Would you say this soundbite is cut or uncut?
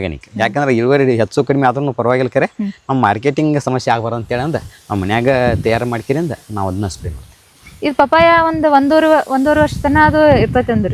uncut